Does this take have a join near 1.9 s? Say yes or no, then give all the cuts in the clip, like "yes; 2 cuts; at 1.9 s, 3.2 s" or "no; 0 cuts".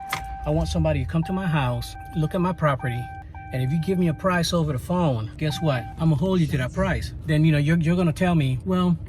no; 1 cut; at 7.2 s